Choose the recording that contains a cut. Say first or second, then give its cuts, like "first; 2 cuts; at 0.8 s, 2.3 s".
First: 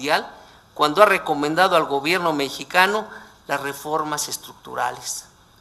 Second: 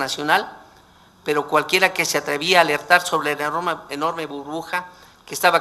first; 1 cut; at 2.7 s